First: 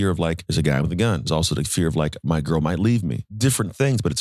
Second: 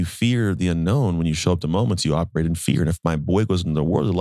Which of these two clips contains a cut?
first; 2 cuts; at 1.2 s, 3.2 s

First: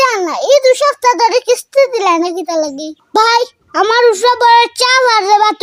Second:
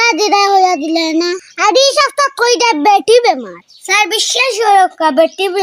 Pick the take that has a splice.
first; 1 cut; at 3.0 s

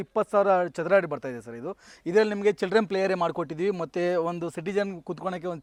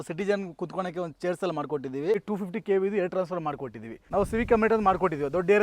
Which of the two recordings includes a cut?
second; 2 cuts; at 2.2 s, 4.0 s

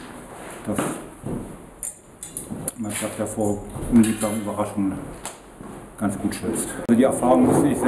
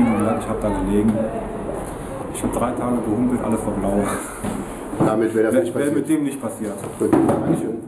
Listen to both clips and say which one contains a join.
first; 1 cut; at 6.9 s

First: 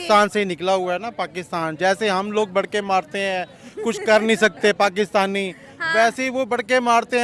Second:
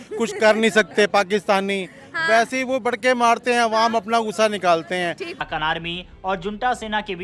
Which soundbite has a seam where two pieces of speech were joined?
second; 1 cut; at 5.4 s

